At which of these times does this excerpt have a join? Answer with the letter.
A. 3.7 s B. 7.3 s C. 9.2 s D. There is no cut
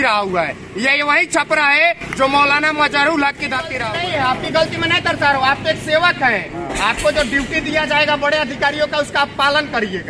A